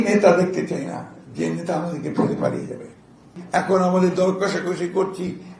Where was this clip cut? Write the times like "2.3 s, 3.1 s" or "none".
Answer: 3.4 s